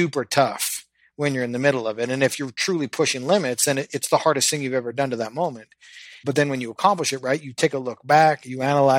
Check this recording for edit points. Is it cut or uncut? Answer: cut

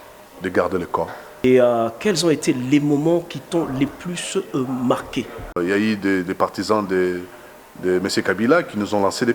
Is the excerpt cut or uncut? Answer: cut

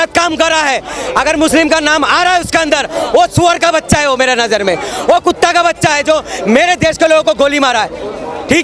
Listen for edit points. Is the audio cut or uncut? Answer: uncut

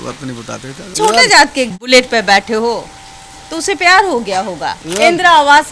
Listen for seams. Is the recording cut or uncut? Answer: cut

